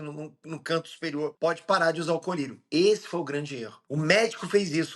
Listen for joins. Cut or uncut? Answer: cut